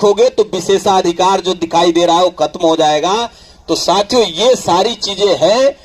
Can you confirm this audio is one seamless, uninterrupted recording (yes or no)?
yes